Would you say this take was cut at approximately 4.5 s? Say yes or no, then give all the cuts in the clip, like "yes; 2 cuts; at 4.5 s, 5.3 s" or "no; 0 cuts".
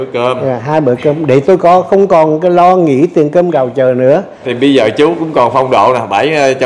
yes; 1 cut; at 4.5 s